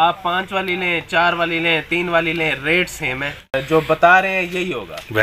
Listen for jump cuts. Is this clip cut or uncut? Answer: cut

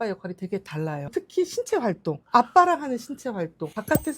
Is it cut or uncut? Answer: cut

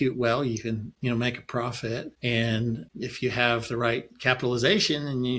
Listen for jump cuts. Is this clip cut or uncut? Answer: cut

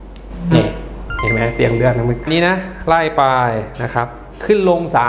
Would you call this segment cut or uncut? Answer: cut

